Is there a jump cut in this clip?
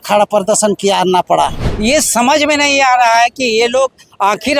yes; 1 cut; at 1.6 s

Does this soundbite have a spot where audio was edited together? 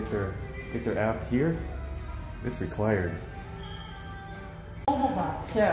yes; 1 cut; at 4.8 s

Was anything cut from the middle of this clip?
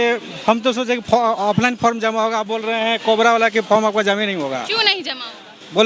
no; 0 cuts

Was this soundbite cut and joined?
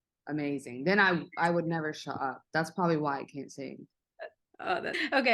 no; 0 cuts

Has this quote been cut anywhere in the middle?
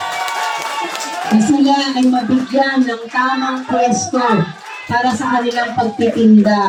no; 0 cuts

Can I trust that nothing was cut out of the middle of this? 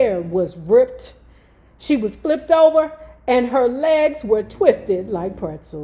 yes; 0 cuts

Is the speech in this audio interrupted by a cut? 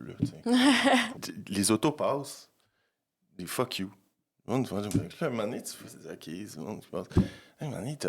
yes; 1 cut; at 1.3 s

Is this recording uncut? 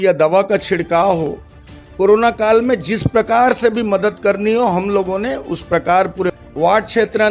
no; 1 cut; at 6.3 s

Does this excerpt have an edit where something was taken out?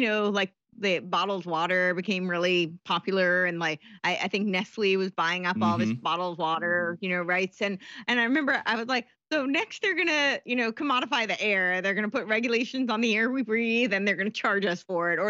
no; 0 cuts

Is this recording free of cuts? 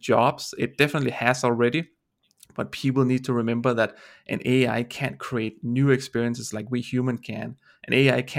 yes; 0 cuts

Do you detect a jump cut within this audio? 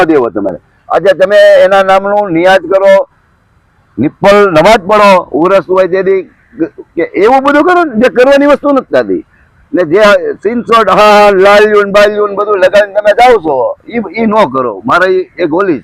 no; 0 cuts

